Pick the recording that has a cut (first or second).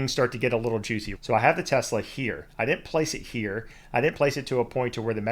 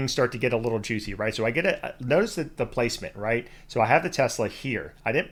first